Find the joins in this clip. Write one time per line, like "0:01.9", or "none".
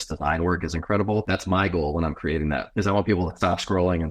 0:01.3